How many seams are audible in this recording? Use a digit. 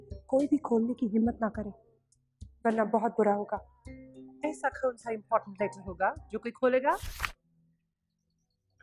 1